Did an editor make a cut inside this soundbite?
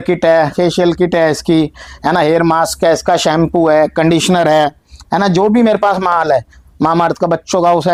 no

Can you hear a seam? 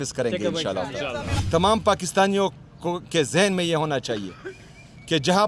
yes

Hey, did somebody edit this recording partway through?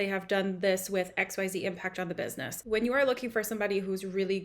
yes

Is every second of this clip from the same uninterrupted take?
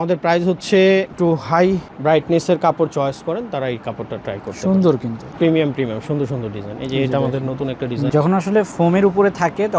no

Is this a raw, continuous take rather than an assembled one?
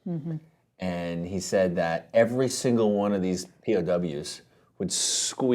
no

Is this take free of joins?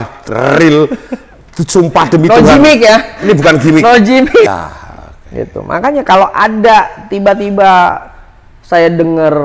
no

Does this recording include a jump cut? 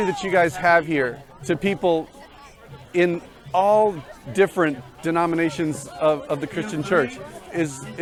no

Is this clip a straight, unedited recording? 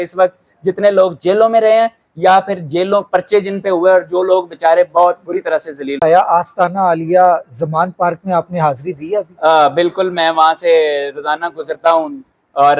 no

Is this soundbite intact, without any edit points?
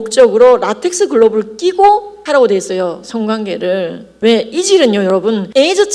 yes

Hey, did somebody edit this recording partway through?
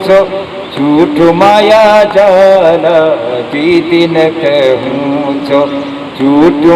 no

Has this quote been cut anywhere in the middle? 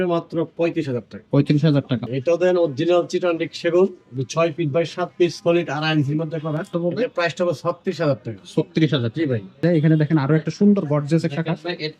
yes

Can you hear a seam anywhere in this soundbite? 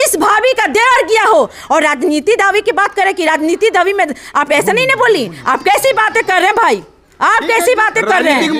no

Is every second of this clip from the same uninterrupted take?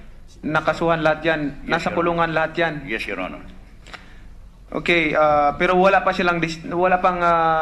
yes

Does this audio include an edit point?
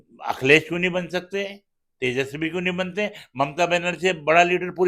no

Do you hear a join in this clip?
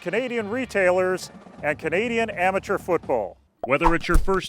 yes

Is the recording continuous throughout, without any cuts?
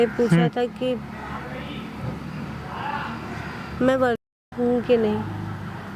yes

